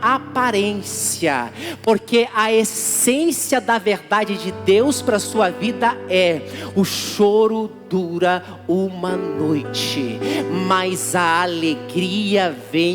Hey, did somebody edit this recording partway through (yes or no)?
no